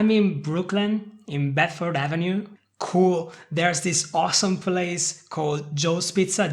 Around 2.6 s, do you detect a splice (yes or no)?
yes